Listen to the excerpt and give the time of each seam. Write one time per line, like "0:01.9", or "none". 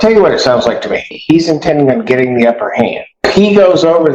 0:01.2
0:03.3